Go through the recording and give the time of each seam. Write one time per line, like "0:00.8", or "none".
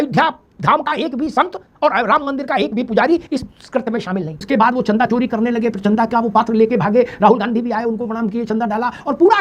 0:04.5